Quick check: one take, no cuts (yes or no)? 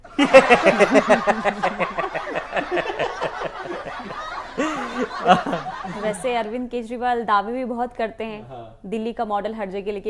yes